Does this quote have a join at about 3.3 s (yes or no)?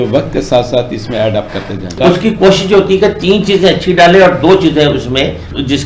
no